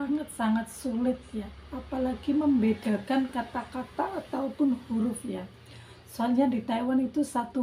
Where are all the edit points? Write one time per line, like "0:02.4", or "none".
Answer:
none